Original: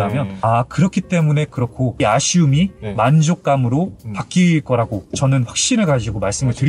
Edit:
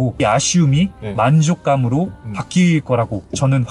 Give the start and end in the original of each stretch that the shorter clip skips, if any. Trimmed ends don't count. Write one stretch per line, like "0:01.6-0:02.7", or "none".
none